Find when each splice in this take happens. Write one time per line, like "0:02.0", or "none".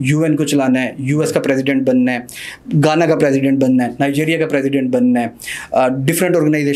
none